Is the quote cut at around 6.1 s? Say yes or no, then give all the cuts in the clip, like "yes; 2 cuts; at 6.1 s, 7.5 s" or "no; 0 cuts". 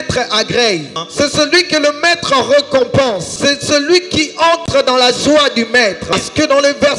yes; 3 cuts; at 1.0 s, 3.3 s, 6.1 s